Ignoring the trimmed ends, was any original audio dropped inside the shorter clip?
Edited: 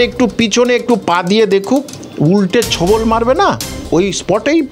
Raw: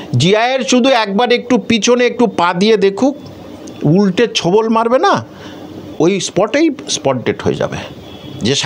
yes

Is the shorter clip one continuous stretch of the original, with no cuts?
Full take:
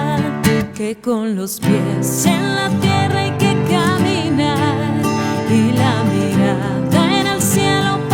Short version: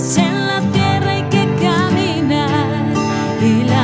yes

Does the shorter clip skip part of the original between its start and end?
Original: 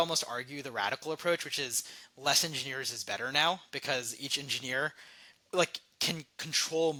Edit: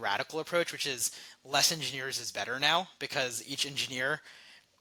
no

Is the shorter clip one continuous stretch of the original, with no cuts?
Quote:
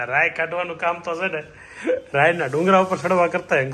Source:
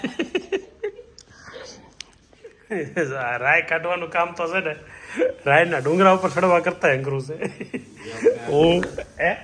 yes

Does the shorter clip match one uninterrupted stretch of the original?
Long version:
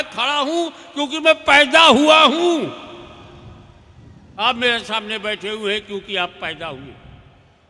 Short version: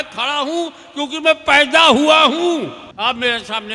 no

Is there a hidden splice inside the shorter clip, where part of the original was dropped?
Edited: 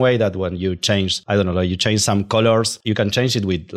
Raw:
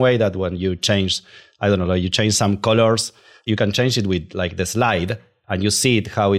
yes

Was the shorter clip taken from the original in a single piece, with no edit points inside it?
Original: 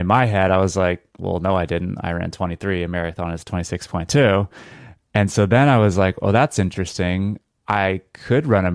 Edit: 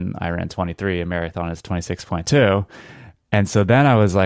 yes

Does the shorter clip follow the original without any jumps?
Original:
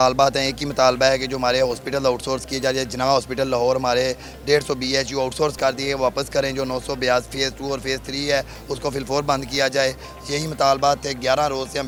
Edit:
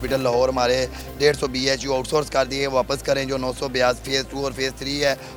yes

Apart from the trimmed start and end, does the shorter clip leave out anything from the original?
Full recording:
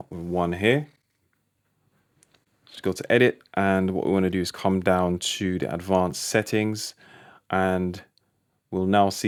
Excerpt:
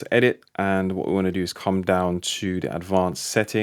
no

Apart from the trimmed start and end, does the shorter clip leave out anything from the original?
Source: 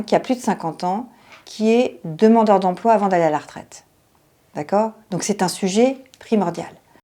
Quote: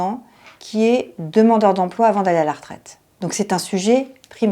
yes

